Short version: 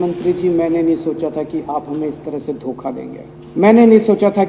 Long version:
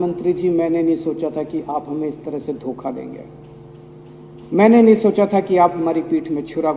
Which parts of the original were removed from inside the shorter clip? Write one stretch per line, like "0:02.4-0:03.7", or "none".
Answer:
0:03.3-0:04.3